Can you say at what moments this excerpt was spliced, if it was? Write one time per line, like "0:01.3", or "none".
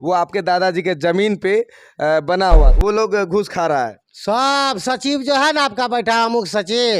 0:02.7